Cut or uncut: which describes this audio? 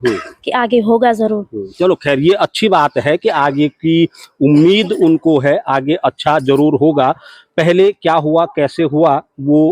uncut